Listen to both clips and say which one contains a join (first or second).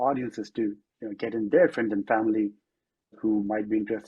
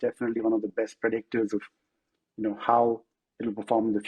first